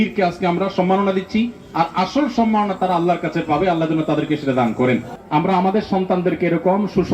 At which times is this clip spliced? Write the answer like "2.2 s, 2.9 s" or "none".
5.1 s